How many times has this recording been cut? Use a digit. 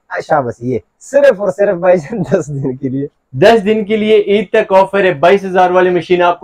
0